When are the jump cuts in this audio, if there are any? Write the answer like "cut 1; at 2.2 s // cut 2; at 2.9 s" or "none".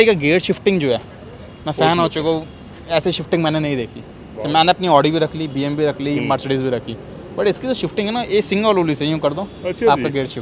none